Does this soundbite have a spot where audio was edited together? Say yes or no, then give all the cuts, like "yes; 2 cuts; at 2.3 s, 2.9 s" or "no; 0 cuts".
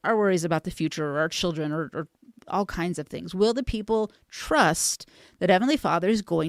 no; 0 cuts